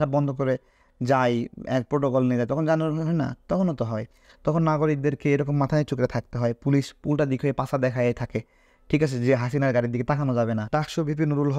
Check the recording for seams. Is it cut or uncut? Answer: cut